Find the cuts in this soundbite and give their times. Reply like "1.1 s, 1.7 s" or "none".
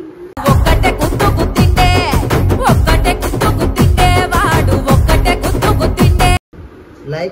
6.4 s